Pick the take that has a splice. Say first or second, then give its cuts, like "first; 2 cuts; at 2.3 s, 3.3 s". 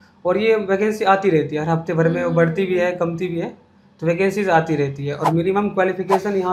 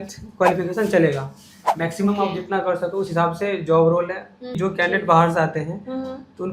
second; 1 cut; at 4.5 s